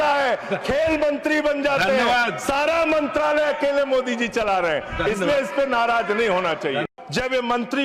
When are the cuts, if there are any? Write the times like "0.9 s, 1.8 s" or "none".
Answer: 6.9 s